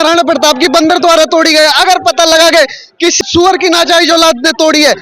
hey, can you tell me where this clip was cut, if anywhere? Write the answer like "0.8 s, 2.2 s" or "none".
3.2 s